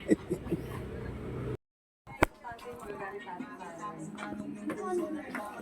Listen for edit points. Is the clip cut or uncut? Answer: cut